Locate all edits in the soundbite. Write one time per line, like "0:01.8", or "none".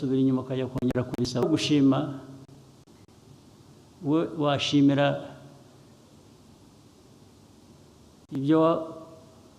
0:01.4